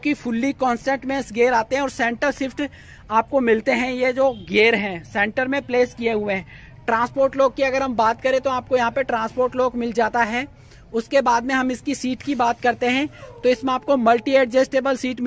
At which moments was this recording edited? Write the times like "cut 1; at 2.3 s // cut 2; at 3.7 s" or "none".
none